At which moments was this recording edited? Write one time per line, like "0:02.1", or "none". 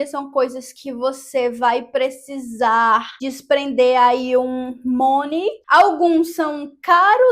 0:05.6

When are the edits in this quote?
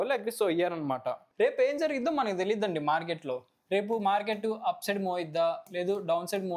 0:01.2

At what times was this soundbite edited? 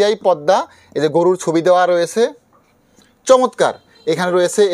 none

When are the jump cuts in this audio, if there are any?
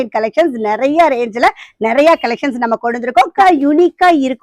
0:03.4

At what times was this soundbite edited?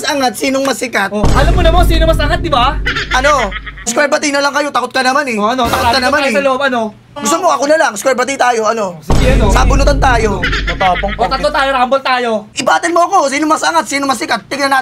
0:03.9
0:07.1
0:12.5

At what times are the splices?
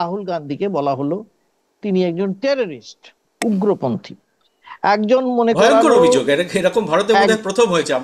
none

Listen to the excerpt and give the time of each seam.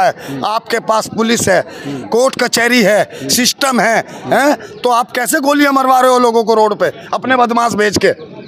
none

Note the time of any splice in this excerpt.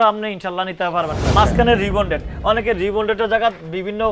0:01.2

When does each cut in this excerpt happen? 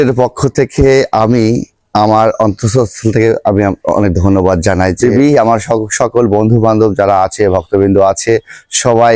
0:05.0

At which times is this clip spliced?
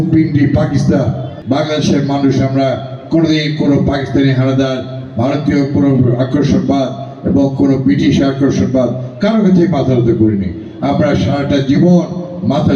0:01.3

